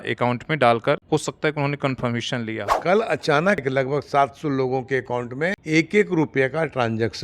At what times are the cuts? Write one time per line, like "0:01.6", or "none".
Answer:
0:01.0
0:02.7
0:03.6
0:05.6